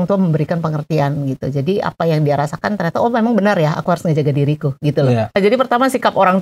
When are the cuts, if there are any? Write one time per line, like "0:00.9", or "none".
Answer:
0:05.4